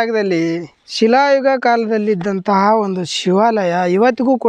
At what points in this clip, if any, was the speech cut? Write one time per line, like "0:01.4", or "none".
none